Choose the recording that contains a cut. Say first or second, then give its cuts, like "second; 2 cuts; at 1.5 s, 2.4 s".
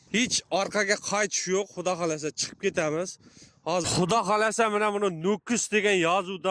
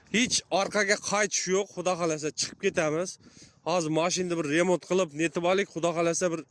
first; 1 cut; at 3.8 s